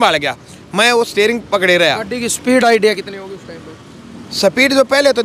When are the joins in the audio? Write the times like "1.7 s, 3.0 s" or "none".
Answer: none